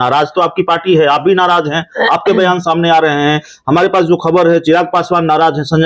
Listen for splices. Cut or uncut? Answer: uncut